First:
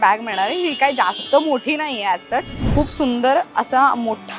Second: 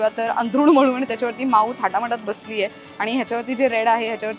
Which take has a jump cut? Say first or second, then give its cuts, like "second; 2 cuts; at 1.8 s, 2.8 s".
first; 1 cut; at 2.6 s